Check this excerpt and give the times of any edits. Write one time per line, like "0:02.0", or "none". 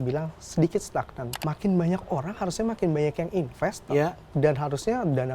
0:01.2